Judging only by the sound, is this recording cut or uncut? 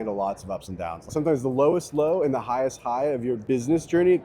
cut